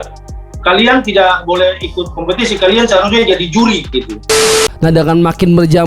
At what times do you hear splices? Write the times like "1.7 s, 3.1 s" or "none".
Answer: 4.4 s